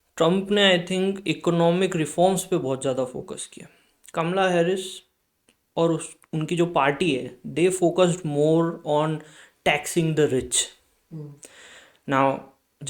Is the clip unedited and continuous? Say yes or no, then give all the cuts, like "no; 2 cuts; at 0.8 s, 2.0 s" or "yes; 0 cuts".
yes; 0 cuts